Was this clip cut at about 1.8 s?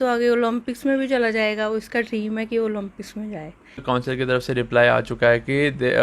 no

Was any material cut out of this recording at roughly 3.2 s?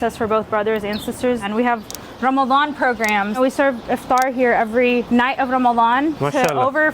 no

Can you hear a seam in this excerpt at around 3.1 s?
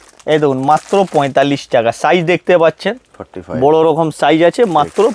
no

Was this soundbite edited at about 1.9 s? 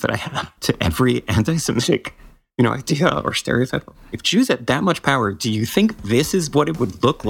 no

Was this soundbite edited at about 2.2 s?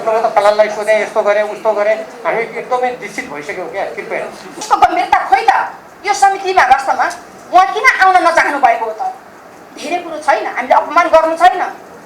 no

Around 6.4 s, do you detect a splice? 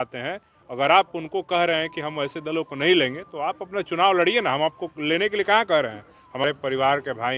yes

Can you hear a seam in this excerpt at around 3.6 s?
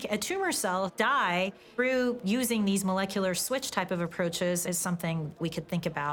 no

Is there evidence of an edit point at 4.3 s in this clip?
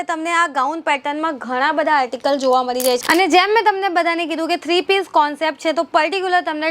no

